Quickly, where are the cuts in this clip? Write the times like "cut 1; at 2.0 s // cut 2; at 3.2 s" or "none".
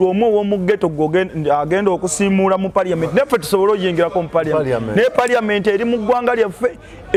none